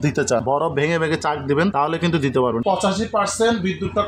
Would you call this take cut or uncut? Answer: cut